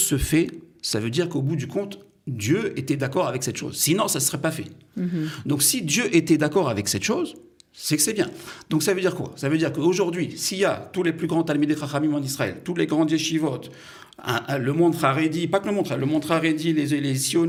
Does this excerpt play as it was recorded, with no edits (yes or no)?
yes